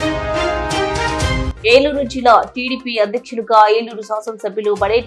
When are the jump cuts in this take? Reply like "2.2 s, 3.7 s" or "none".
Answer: 1.5 s